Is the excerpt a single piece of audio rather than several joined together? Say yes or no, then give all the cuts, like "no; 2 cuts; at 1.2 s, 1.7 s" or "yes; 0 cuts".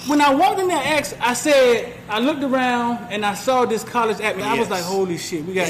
no; 1 cut; at 4.4 s